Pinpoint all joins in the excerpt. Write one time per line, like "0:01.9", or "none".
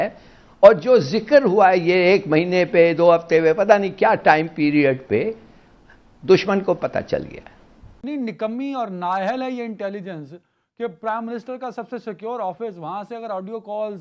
0:08.0